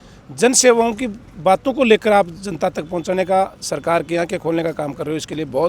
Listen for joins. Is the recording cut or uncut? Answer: uncut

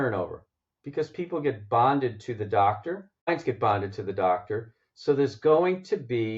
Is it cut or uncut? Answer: cut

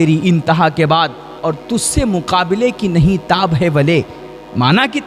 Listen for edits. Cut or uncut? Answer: uncut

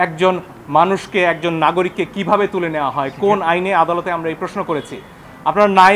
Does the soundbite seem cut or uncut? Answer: uncut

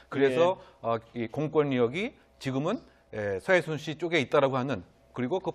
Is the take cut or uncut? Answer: uncut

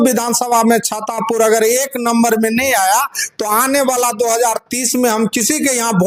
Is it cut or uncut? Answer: uncut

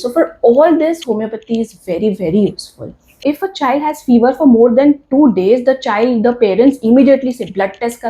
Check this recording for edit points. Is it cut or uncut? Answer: cut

